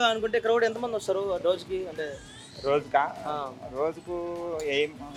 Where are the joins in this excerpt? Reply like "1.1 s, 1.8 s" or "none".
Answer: none